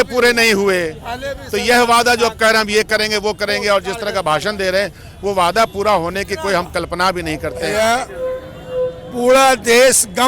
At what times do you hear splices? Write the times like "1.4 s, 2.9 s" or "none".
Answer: 7.6 s